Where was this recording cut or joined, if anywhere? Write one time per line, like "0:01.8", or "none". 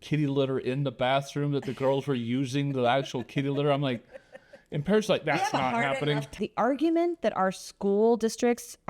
0:06.3